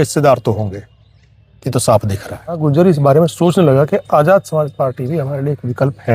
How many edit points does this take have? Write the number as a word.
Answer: one